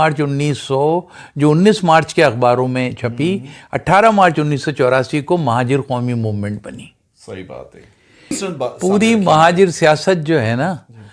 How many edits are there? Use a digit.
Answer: 1